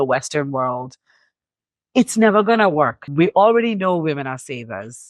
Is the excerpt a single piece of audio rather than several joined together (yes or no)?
no